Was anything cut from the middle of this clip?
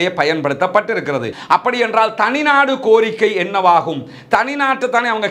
yes; 1 cut; at 1.3 s

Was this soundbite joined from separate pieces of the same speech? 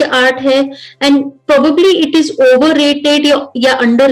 no; 0 cuts

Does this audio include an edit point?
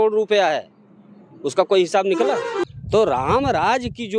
yes; 1 cut; at 2.7 s

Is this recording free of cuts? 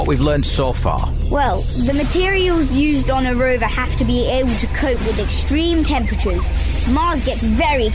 yes; 0 cuts

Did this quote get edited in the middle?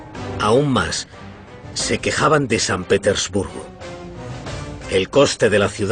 no; 0 cuts

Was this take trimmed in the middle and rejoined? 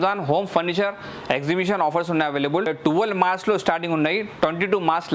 yes; 1 cut; at 2.8 s

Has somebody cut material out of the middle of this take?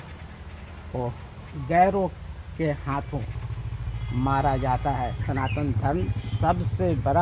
yes; 1 cut; at 5.2 s

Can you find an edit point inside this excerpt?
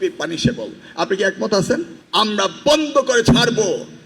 yes; 1 cut; at 2.0 s

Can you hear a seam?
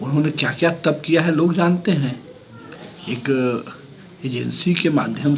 no; 0 cuts

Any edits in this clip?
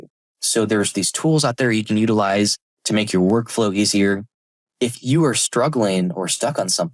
yes; 1 cut; at 4.3 s

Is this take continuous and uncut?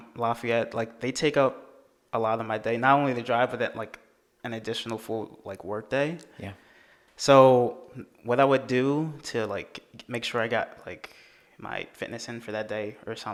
yes; 0 cuts

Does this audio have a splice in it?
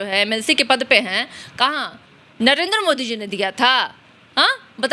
no; 0 cuts

